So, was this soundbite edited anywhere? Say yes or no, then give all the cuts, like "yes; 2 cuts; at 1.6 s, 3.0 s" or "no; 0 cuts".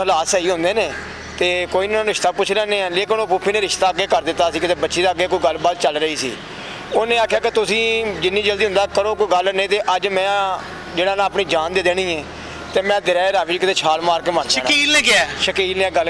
no; 0 cuts